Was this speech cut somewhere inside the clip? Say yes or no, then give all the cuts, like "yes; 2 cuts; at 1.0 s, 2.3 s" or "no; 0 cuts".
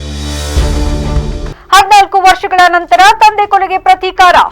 no; 0 cuts